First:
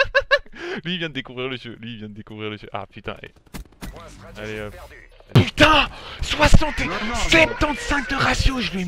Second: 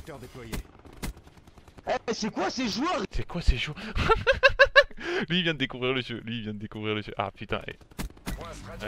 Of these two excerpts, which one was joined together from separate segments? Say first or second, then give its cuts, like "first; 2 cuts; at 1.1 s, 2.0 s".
first; 1 cut; at 5.4 s